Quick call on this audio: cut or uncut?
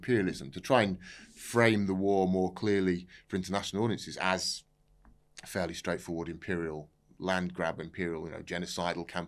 uncut